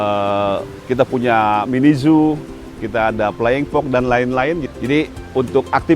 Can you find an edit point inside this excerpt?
yes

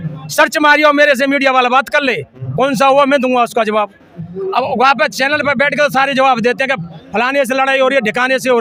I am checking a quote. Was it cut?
no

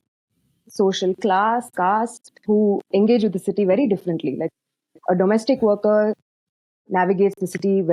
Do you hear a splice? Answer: no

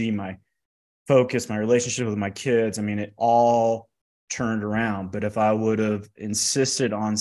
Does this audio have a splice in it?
no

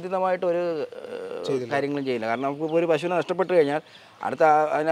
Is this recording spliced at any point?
no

